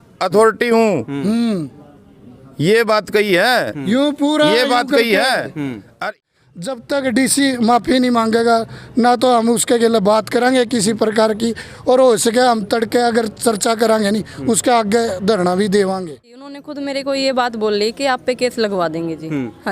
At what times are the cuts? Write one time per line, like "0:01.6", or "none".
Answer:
0:06.2
0:16.6